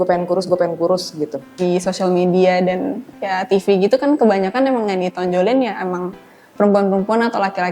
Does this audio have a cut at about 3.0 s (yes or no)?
no